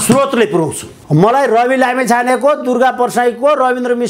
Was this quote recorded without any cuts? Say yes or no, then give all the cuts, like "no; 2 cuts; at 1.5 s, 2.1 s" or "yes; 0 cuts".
no; 1 cut; at 0.9 s